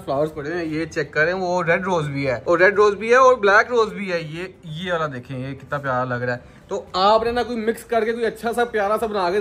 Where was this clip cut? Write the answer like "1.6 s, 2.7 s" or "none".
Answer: none